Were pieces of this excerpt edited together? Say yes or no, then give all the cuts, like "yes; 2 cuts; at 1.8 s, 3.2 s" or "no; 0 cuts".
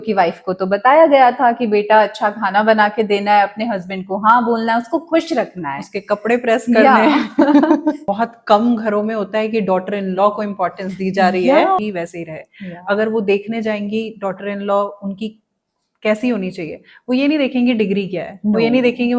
yes; 2 cuts; at 8.0 s, 11.8 s